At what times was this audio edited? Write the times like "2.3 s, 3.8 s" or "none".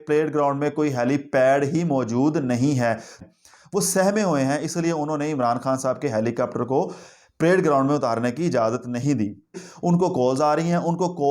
3.2 s, 9.7 s